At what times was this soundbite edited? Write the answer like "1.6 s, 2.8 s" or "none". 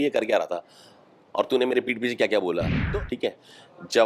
2.8 s